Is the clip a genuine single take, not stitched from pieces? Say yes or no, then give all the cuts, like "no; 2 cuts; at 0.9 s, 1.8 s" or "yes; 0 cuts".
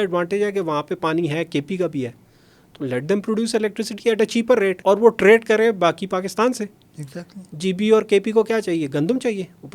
no; 1 cut; at 4.8 s